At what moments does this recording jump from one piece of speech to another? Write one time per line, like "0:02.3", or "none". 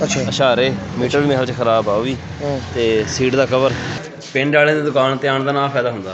0:04.0